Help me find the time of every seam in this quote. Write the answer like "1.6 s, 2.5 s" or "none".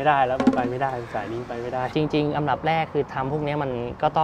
1.9 s